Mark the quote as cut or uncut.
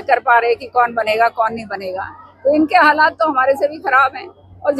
uncut